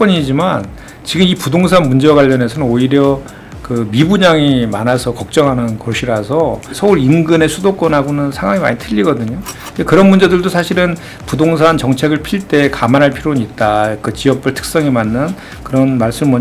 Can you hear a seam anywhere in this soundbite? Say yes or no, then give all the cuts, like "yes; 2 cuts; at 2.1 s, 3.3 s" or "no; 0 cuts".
yes; 1 cut; at 6.7 s